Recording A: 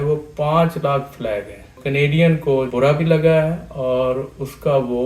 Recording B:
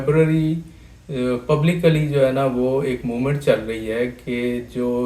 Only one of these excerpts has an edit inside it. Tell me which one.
A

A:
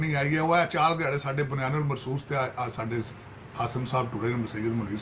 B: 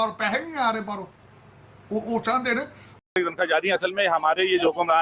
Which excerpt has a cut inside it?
B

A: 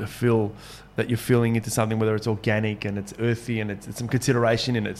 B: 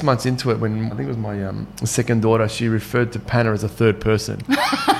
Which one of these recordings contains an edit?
B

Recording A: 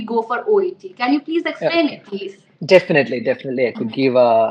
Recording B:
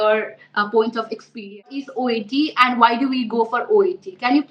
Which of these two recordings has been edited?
B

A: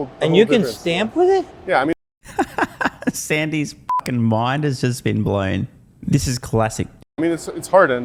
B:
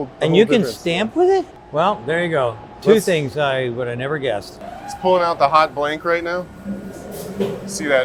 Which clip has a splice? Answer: B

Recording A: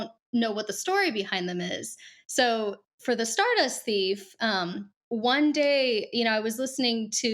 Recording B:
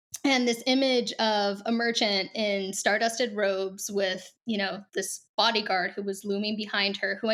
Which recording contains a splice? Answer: A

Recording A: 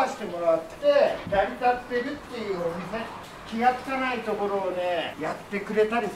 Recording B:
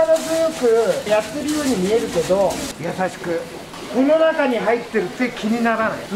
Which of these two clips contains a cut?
A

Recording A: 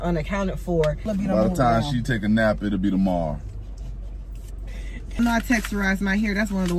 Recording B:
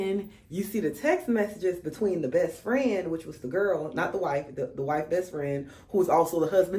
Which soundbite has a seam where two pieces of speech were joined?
A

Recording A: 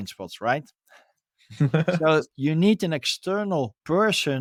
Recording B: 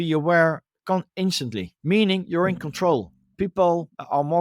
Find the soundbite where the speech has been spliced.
B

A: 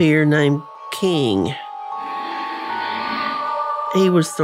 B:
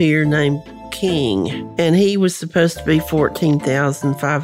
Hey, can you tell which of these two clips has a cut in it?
B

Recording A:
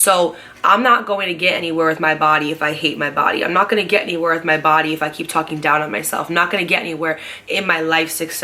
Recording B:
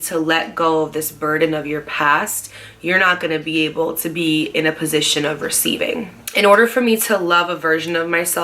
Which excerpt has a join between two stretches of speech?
B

